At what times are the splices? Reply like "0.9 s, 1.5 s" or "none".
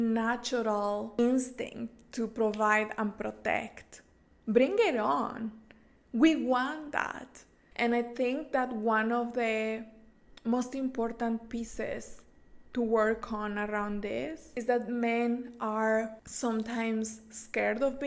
1.2 s